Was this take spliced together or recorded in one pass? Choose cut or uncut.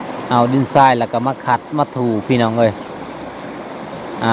uncut